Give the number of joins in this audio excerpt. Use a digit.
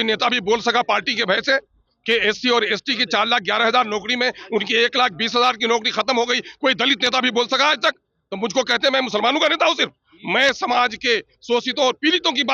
0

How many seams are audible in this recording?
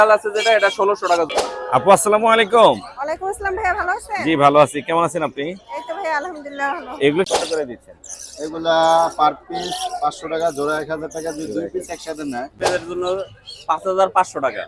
3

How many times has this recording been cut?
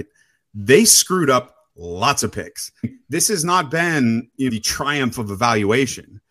2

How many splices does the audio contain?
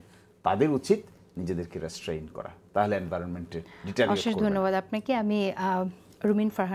0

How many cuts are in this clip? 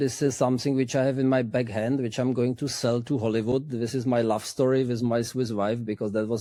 0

